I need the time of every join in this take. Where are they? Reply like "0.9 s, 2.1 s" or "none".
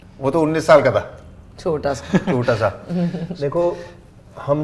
3.4 s